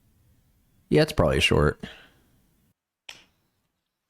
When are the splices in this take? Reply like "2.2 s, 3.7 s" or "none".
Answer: 2.7 s